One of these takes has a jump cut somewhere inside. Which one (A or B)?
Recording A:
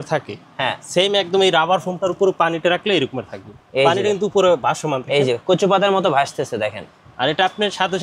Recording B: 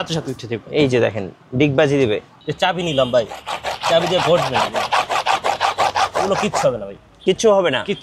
B